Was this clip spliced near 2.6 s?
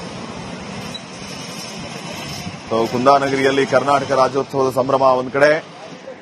yes; 1 cut; at 2.6 s

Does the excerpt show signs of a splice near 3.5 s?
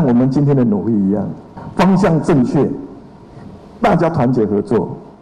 no; 1 cut; at 1.6 s

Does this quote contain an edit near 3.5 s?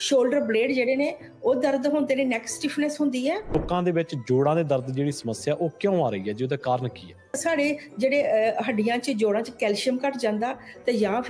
yes; 2 cuts; at 3.5 s, 7.4 s

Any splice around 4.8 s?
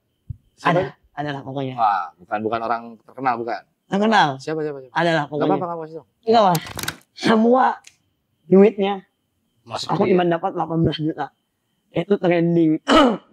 no; 1 cut; at 6.8 s

